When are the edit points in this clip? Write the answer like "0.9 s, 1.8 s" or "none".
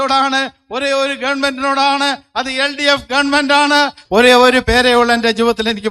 4.0 s